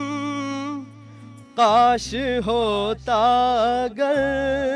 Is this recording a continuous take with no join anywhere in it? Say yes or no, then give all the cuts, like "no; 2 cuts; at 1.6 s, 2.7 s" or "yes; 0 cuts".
yes; 0 cuts